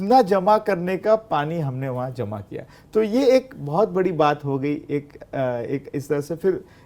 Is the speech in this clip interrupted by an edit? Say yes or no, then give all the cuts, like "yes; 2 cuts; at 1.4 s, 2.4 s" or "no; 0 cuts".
no; 0 cuts